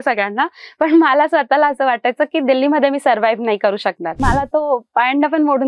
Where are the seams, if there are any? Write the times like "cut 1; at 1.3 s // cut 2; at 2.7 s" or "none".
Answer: cut 1; at 4.2 s